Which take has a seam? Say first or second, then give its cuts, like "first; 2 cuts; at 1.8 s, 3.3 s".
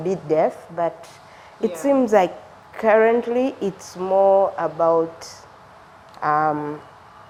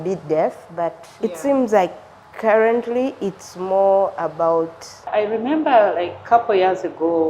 second; 2 cuts; at 1.0 s, 5.1 s